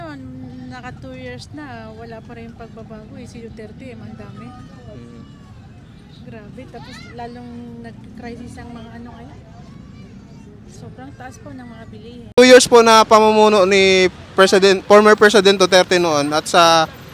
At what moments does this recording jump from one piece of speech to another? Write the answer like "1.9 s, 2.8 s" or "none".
12.4 s